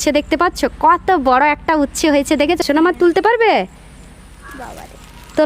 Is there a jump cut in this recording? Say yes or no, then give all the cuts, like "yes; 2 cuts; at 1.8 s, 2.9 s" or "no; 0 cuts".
yes; 1 cut; at 2.6 s